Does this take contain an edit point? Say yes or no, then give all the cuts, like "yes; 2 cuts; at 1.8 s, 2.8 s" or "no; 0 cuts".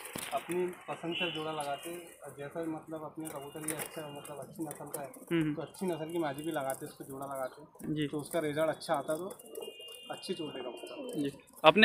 no; 0 cuts